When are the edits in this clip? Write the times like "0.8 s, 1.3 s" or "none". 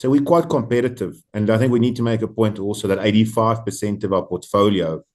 none